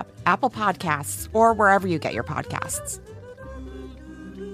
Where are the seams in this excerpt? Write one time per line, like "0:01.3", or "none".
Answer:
none